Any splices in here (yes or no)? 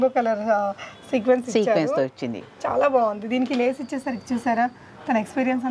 no